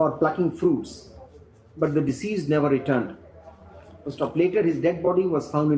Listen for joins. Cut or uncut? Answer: uncut